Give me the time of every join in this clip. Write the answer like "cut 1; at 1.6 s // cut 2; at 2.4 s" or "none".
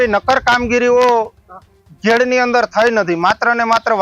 none